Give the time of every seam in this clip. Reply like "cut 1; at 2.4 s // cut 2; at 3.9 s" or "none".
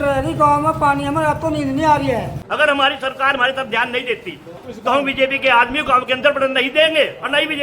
cut 1; at 2.4 s // cut 2; at 4.5 s